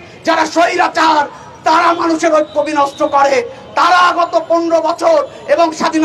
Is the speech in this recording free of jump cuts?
yes; 0 cuts

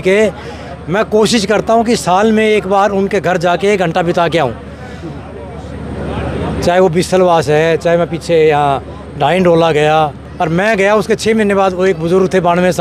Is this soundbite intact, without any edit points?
yes; 0 cuts

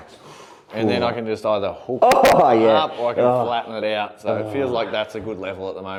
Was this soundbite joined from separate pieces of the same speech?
no; 0 cuts

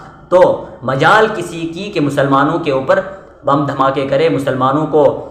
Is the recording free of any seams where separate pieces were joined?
yes; 0 cuts

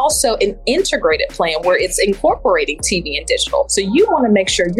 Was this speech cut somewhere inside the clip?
yes; 1 cut; at 3.7 s

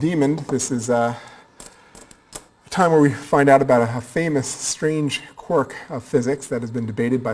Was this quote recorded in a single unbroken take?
yes; 0 cuts

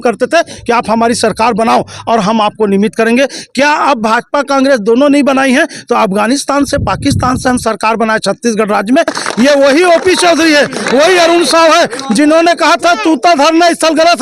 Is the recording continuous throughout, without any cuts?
no; 1 cut; at 9.2 s

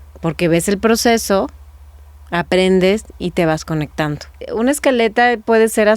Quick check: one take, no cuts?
no; 1 cut; at 4.5 s

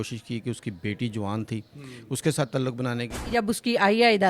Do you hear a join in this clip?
yes; 1 cut; at 3.3 s

